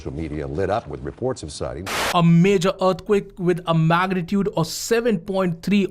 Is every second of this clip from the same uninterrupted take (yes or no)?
no